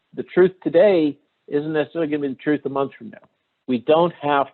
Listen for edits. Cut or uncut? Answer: cut